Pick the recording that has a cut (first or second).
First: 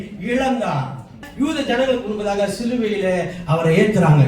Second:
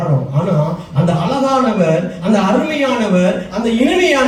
first